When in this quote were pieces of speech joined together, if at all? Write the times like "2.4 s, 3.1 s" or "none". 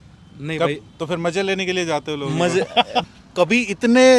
3.0 s